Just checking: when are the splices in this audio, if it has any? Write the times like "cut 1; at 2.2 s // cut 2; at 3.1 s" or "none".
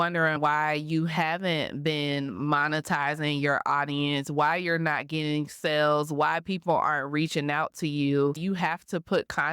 cut 1; at 8.4 s